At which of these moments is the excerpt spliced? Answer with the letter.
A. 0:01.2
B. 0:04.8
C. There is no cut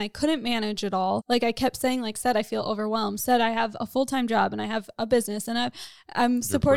A